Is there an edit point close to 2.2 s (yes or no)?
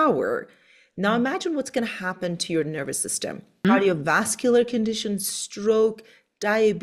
no